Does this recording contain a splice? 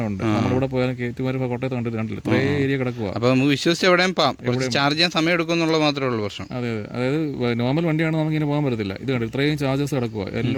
no; 0 cuts

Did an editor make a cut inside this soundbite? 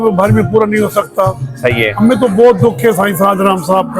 yes; 1 cut; at 1.9 s

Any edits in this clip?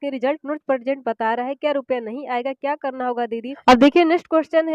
yes; 1 cut; at 3.5 s

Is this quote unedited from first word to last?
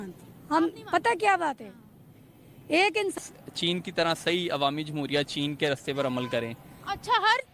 no; 1 cut; at 3.2 s

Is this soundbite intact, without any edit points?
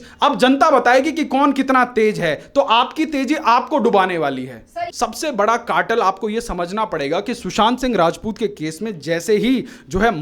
no; 1 cut; at 4.9 s

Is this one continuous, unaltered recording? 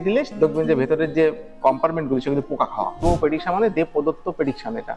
no; 1 cut; at 3.0 s

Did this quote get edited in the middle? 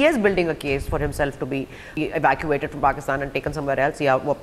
yes; 1 cut; at 1.9 s

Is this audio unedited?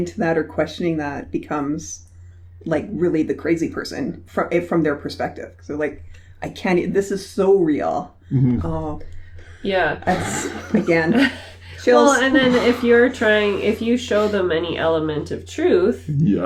yes; 0 cuts

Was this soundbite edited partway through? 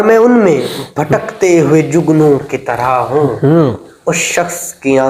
no; 0 cuts

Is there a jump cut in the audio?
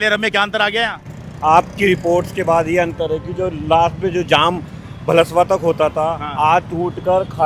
no; 0 cuts

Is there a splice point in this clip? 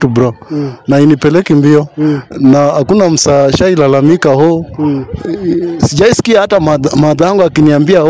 no; 0 cuts

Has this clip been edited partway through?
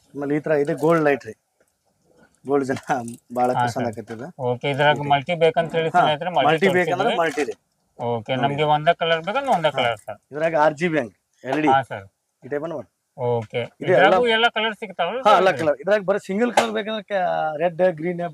no; 0 cuts

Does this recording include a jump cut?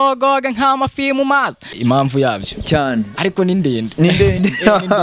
yes; 1 cut; at 1.8 s

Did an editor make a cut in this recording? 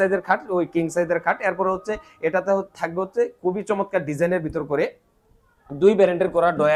no; 0 cuts

